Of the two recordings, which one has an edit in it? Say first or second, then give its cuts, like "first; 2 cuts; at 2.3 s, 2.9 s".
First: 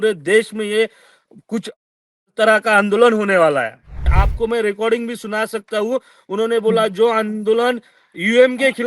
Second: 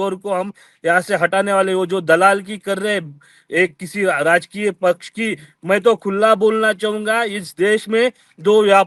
first; 1 cut; at 4.1 s